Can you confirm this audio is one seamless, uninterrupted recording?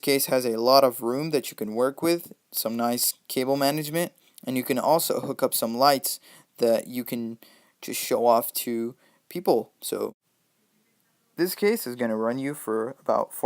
no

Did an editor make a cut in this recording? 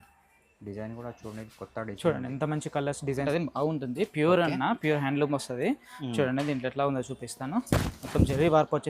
yes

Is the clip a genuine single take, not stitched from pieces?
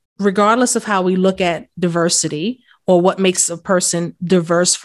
yes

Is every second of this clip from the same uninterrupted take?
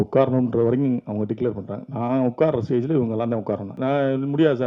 no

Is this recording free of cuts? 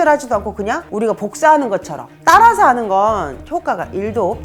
yes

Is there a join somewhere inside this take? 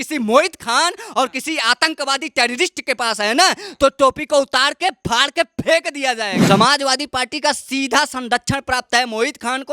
yes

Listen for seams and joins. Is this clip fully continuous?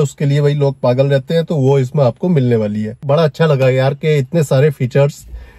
no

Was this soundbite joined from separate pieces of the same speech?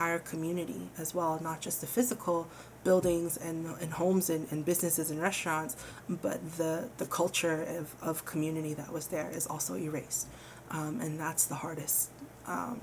no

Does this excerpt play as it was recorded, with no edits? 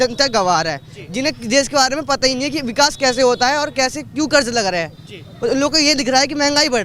yes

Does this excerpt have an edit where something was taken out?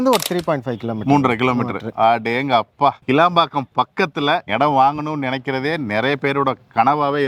no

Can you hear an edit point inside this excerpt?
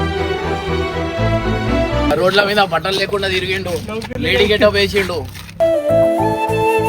yes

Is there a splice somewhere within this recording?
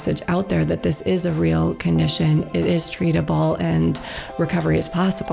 no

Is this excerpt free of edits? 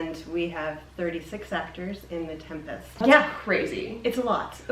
no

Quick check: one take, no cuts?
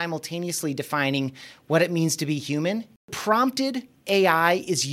no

